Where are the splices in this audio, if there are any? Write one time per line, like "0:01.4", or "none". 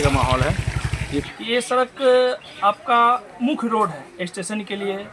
0:01.3